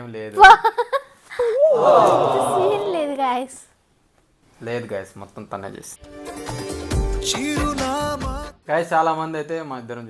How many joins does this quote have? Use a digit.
1